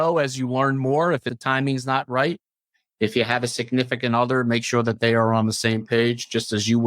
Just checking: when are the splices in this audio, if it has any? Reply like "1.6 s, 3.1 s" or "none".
1.3 s